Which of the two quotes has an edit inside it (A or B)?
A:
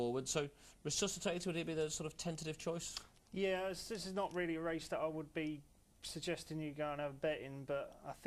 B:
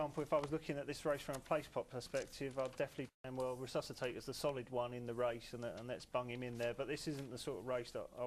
B